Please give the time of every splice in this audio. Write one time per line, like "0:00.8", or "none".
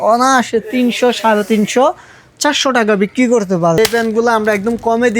0:03.8